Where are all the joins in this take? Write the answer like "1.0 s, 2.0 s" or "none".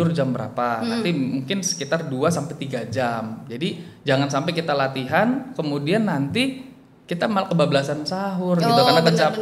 none